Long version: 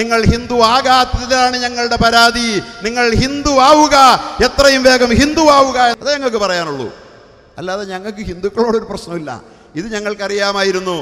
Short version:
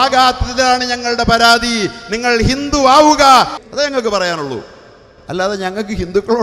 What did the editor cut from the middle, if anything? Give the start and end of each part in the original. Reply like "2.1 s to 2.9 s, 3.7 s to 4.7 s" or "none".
4.4 s to 5.9 s